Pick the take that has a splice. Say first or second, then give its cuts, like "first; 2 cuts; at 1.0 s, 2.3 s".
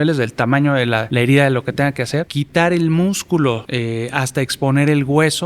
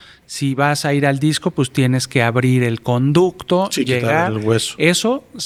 first; 3 cuts; at 1.1 s, 2.4 s, 3.7 s